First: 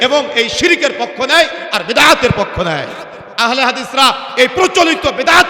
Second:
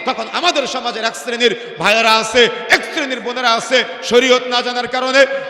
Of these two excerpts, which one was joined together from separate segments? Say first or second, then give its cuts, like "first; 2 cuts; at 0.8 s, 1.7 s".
first; 1 cut; at 3.3 s